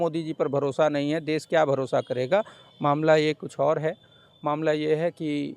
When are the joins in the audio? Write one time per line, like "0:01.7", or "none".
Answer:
none